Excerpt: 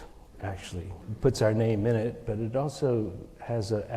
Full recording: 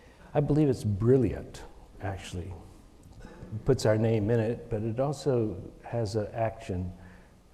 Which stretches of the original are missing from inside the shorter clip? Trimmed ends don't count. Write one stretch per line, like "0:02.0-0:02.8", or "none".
0:02.6-0:03.4